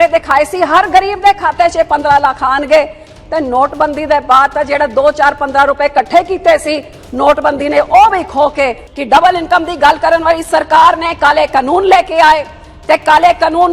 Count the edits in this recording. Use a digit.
1